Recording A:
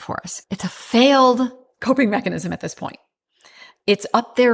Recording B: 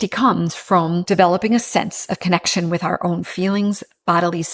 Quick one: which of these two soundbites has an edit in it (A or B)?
B